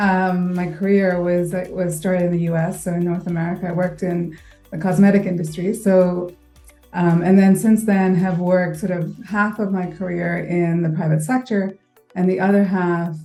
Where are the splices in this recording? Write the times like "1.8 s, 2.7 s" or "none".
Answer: none